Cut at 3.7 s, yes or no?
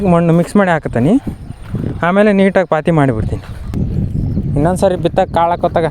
yes